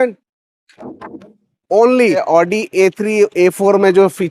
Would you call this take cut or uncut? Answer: cut